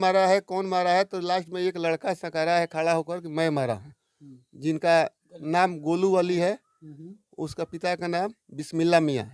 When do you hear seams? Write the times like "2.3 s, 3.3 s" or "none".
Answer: none